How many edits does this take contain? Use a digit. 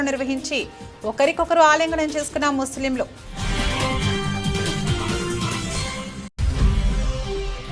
0